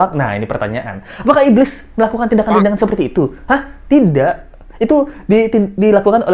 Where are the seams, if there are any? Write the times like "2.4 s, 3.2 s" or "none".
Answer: none